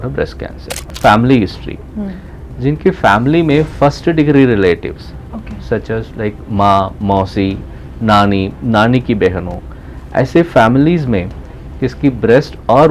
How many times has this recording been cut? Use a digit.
1